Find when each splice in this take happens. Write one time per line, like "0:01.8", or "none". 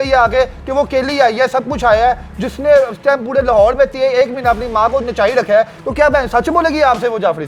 none